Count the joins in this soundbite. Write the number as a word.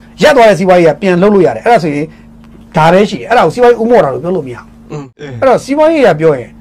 one